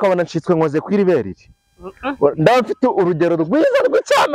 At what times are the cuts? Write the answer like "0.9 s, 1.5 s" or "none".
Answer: none